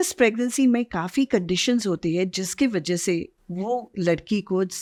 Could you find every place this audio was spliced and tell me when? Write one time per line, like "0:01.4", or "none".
none